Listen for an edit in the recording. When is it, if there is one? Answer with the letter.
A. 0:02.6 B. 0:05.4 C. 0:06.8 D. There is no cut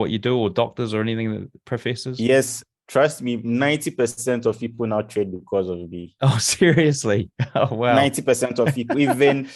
D